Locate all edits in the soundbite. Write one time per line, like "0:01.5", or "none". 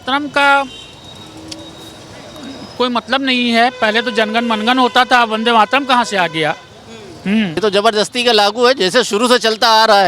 0:07.6